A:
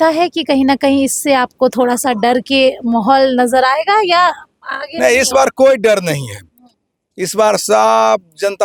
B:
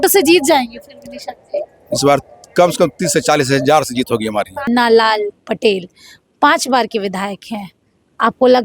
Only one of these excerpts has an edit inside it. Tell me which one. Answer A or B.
B